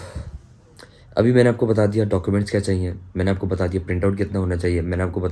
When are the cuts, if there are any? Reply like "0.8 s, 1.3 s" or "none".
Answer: none